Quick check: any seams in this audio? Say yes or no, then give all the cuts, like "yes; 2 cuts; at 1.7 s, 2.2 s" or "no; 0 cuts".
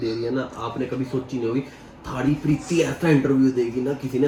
no; 0 cuts